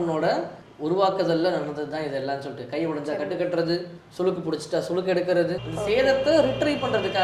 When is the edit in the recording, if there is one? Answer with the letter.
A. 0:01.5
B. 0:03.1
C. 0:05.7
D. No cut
C